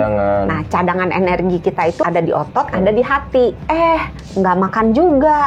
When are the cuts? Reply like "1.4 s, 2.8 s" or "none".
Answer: 2.0 s, 3.6 s